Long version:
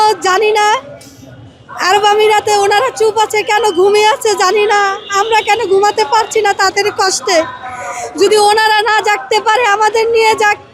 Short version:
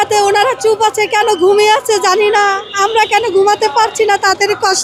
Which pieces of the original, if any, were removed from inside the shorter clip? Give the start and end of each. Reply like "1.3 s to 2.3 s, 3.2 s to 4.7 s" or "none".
none